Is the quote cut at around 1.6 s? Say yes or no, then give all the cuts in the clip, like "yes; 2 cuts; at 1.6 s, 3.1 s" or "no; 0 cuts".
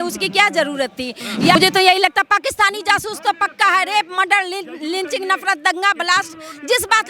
yes; 1 cut; at 1.6 s